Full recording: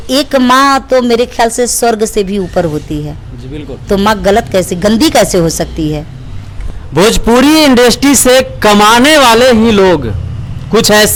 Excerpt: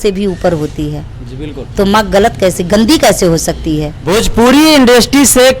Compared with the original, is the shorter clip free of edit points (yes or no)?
no